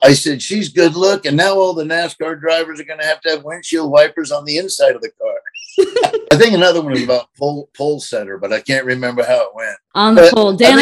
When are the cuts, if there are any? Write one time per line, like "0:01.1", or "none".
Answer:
0:06.3
0:09.8